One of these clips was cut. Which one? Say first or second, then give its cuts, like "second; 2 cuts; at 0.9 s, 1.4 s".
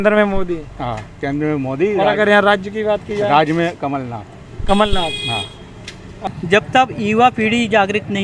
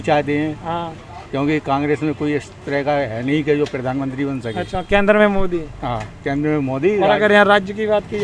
first; 1 cut; at 6.2 s